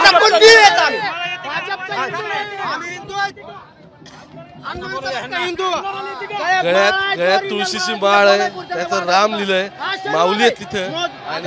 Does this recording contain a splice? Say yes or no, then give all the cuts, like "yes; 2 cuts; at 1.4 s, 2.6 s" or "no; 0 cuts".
no; 0 cuts